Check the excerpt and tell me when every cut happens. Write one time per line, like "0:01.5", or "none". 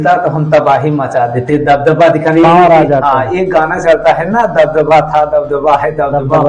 none